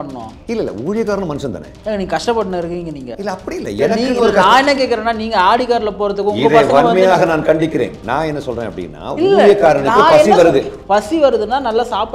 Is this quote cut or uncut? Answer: uncut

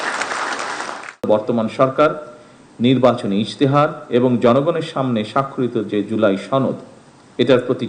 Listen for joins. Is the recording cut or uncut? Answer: cut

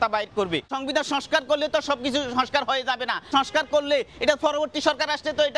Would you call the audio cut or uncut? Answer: cut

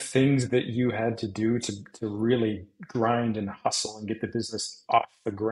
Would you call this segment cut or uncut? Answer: uncut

